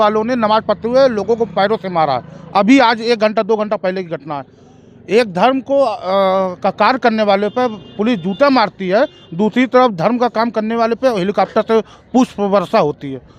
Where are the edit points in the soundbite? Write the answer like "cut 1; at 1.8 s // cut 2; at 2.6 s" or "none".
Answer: none